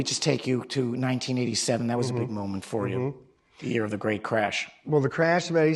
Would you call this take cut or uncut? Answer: cut